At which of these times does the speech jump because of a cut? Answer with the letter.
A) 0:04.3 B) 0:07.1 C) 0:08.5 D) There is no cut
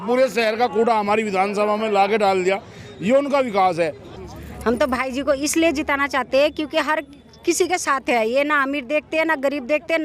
A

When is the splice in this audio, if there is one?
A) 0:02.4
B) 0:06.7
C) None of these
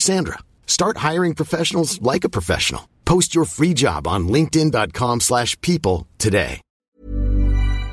B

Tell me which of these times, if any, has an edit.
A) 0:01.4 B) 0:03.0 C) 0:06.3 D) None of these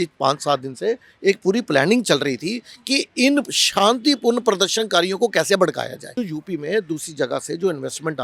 C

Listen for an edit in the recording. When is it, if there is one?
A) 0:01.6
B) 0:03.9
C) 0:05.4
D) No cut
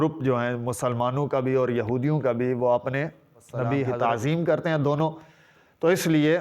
B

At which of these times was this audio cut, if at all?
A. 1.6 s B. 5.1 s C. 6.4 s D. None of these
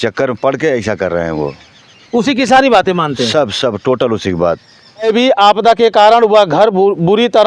B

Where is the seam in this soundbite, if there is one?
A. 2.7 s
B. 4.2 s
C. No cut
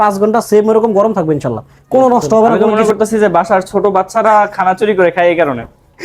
A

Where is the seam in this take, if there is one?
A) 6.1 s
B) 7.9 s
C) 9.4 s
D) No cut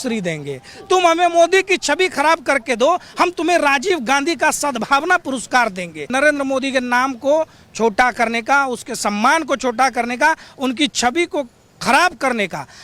A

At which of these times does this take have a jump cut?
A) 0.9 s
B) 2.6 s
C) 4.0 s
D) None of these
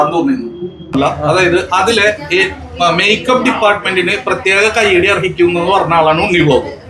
A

